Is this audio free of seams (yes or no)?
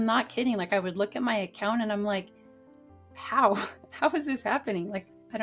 yes